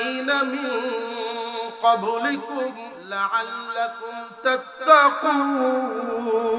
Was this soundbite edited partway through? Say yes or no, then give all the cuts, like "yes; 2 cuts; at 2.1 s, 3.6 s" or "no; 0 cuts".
yes; 1 cut; at 2.9 s